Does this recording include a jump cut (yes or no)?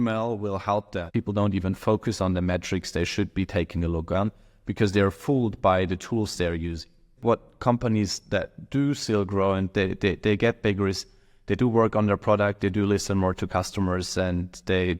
yes